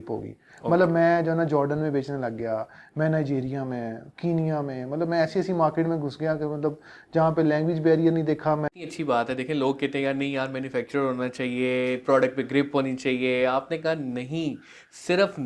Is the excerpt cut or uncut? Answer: cut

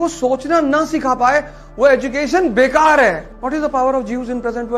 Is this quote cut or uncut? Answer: uncut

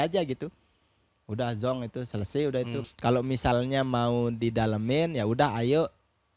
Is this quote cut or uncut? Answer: cut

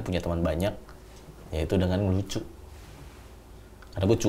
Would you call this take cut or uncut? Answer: uncut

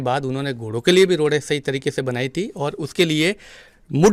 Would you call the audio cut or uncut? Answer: uncut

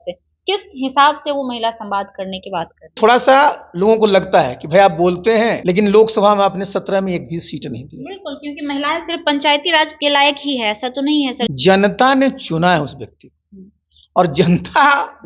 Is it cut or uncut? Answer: cut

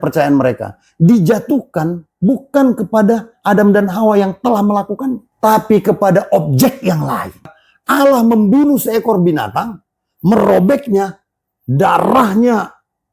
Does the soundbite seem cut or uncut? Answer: cut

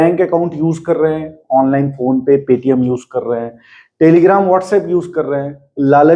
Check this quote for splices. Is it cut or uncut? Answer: uncut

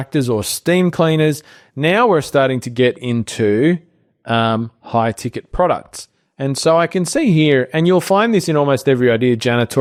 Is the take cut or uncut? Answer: uncut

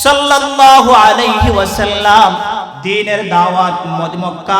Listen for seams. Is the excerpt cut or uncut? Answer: cut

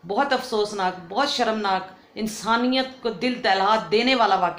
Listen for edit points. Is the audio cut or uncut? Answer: uncut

